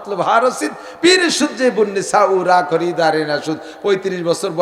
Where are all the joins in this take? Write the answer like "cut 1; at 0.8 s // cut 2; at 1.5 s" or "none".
none